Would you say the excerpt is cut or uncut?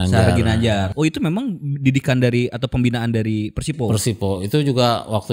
cut